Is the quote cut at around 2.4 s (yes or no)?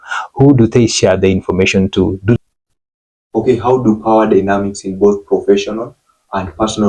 yes